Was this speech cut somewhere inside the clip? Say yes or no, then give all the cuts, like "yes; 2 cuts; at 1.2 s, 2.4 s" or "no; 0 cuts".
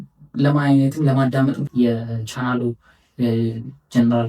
yes; 1 cut; at 1.6 s